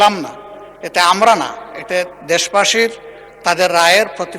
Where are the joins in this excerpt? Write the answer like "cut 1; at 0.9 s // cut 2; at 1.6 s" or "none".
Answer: none